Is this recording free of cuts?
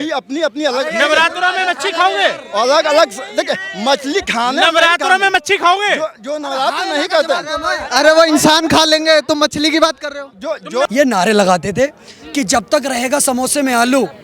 no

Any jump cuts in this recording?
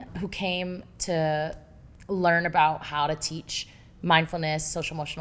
no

